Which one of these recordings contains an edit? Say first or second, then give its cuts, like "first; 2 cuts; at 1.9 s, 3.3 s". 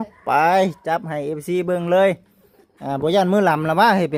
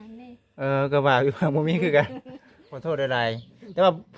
second; 1 cut; at 2.8 s